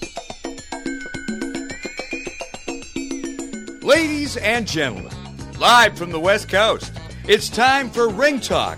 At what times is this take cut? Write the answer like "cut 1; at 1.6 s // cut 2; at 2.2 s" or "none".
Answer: cut 1; at 3.8 s